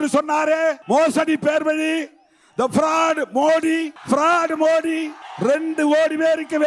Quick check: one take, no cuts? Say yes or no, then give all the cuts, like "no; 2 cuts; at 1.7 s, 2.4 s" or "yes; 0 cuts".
no; 3 cuts; at 0.8 s, 3.9 s, 5.2 s